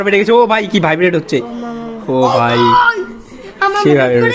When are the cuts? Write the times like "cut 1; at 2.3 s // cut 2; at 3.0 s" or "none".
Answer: none